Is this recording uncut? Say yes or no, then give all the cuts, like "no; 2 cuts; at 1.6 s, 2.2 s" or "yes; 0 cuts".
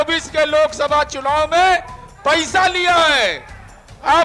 yes; 0 cuts